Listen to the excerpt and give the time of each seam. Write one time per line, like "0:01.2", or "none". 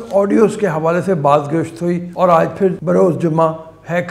0:02.1
0:02.8